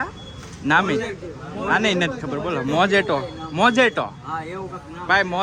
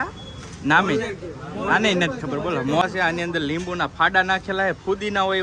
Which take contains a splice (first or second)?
second